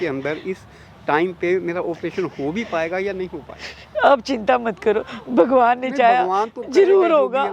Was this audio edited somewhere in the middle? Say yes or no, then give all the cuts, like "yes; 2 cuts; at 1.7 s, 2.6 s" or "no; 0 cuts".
no; 0 cuts